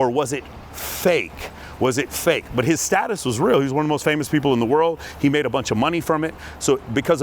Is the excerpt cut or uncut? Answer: uncut